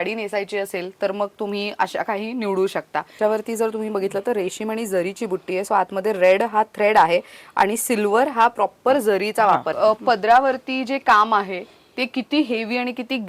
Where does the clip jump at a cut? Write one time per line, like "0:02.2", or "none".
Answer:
0:03.2
0:09.7